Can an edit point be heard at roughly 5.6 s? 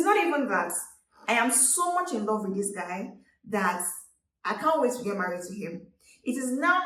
no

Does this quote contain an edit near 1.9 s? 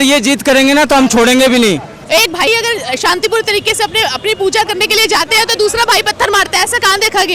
yes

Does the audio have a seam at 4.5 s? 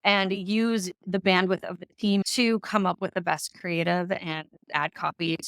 no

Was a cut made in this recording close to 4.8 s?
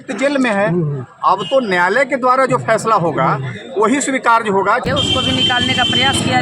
yes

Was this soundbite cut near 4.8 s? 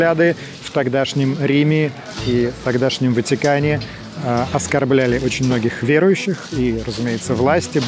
no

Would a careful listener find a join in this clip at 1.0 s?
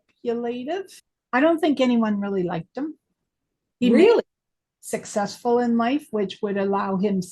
yes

